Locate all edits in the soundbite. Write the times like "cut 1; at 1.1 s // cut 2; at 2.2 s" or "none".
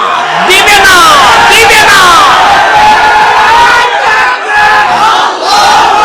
none